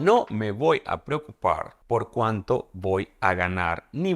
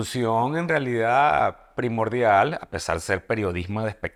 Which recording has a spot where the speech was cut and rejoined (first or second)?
first